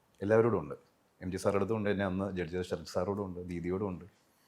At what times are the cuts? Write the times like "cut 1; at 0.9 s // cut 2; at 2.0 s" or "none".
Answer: none